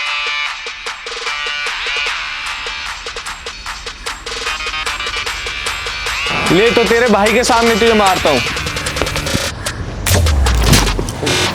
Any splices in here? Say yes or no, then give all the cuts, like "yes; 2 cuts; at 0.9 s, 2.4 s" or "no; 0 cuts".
no; 0 cuts